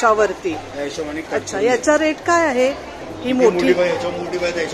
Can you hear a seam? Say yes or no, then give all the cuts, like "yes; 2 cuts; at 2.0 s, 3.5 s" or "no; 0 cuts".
yes; 1 cut; at 2.9 s